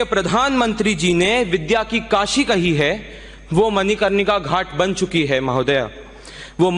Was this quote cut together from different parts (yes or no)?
no